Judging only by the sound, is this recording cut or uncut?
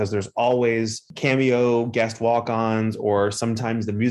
uncut